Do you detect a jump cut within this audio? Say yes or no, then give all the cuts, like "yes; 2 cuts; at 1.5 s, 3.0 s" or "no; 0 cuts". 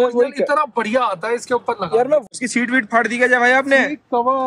yes; 1 cut; at 2.3 s